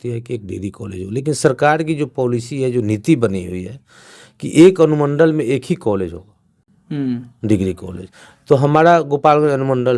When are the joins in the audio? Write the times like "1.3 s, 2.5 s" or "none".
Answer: none